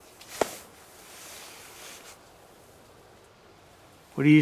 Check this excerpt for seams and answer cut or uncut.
uncut